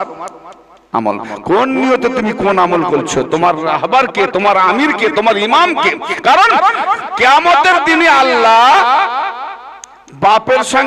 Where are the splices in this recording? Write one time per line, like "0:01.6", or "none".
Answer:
none